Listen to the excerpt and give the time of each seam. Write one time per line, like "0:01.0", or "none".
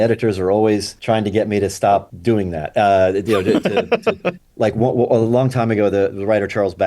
0:00.9
0:02.1

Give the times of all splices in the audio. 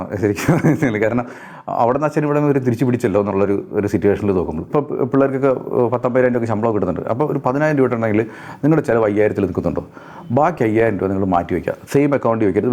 0:04.7

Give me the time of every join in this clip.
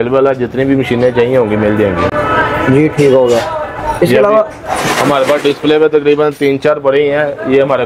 none

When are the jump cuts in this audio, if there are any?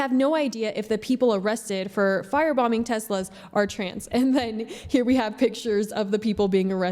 none

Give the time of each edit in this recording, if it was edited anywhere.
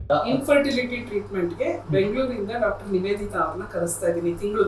none

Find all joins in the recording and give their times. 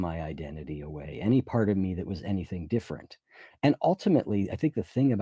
none

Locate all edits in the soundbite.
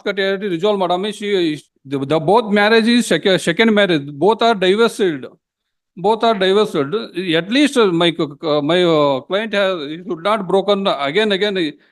0:01.4

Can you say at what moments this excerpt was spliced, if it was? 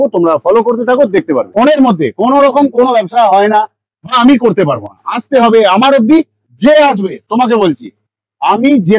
0:01.5

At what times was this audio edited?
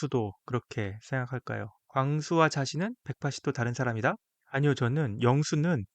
0:01.8
0:04.3

